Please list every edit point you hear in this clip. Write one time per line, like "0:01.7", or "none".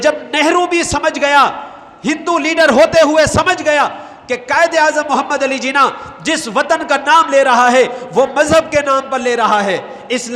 none